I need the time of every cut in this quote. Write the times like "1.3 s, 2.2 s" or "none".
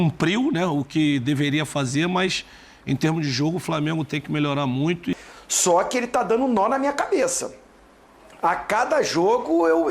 5.1 s